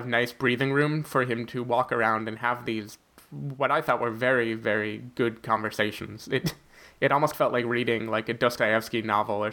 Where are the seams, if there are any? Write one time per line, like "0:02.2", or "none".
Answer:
none